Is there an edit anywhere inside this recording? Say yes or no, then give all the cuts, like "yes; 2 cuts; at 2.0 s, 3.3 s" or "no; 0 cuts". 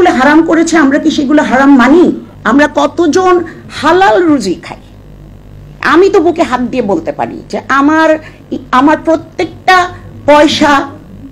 yes; 1 cut; at 2.3 s